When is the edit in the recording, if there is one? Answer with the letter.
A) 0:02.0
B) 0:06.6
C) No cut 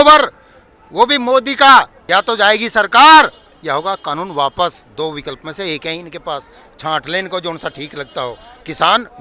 A